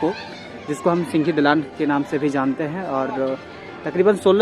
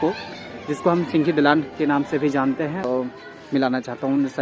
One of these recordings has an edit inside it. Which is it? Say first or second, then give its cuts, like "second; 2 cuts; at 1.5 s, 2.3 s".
second; 1 cut; at 2.9 s